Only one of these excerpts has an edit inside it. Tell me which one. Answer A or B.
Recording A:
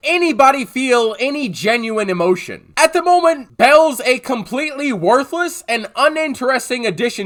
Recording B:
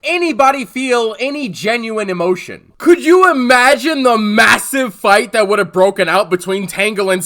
B